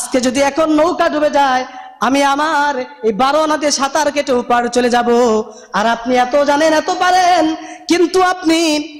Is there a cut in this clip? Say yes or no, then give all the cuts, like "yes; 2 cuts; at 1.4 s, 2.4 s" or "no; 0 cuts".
no; 0 cuts